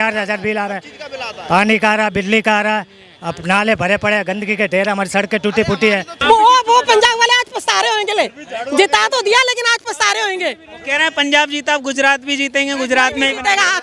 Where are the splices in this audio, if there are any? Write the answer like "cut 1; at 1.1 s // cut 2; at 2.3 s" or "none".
cut 1; at 6.1 s

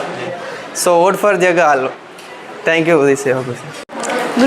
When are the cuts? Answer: none

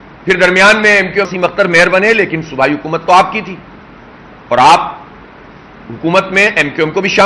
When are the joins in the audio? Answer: cut 1; at 1.3 s

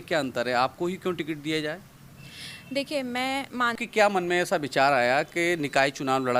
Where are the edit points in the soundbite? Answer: cut 1; at 3.8 s

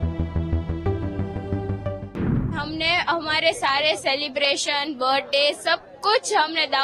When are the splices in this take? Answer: cut 1; at 2.5 s

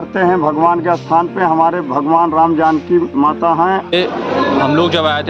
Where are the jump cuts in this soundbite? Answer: cut 1; at 3.9 s

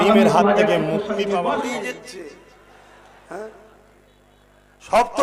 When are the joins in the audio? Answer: cut 1; at 1.7 s

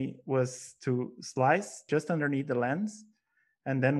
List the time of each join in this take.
cut 1; at 1.8 s

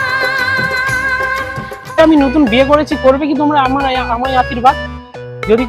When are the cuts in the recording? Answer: cut 1; at 2.0 s

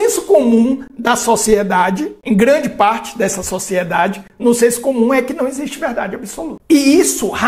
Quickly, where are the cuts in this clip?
cut 1; at 2.1 s // cut 2; at 6.5 s

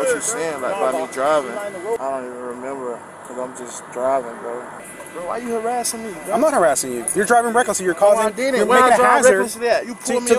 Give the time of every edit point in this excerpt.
cut 1; at 2.0 s // cut 2; at 4.7 s

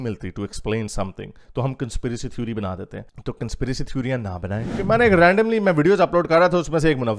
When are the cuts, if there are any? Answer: cut 1; at 4.7 s

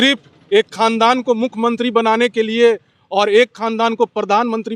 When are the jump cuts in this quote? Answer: none

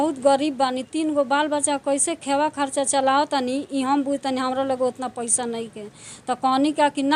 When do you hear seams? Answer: none

